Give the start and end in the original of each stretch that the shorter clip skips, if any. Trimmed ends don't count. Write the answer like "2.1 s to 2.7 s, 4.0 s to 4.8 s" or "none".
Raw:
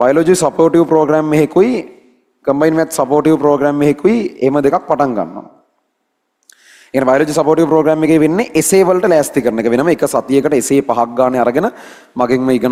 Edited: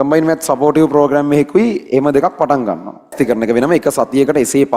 5.6 s to 9.3 s